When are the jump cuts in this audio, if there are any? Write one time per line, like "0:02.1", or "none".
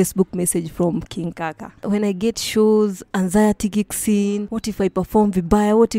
0:01.7
0:04.5